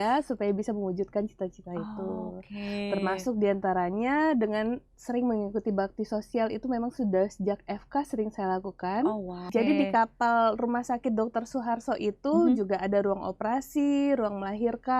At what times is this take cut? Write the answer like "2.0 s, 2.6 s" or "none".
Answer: 9.4 s